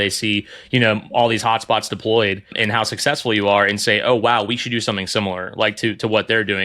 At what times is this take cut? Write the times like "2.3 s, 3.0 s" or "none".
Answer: 2.6 s